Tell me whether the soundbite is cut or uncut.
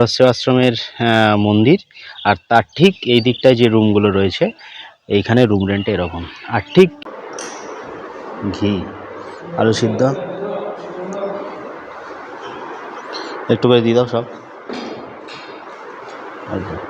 cut